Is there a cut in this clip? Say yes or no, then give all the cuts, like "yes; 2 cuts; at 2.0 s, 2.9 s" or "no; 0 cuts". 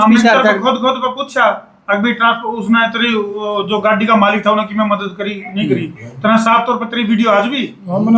no; 0 cuts